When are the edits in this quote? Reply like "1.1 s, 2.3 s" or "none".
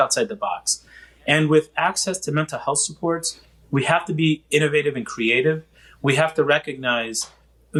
none

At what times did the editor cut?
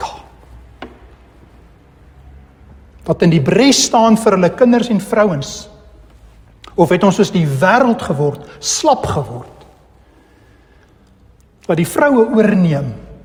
none

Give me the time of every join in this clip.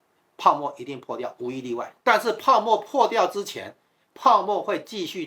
1.8 s

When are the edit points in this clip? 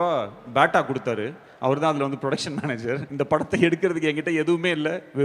3.1 s

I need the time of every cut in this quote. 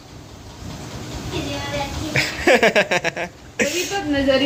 none

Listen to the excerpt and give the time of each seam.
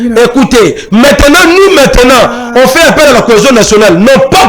none

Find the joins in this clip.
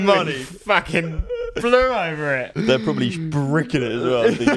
2.5 s

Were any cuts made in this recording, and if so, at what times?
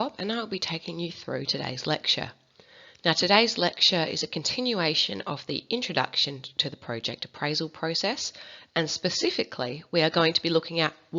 10.1 s

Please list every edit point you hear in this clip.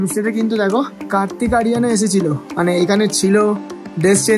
1.0 s

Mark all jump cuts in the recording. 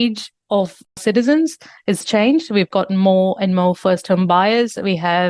0.9 s

